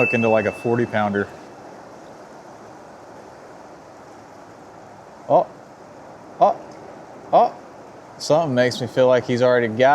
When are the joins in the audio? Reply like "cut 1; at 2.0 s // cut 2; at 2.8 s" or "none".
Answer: cut 1; at 1.3 s